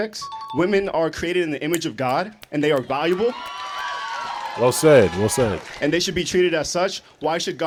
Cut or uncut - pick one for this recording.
uncut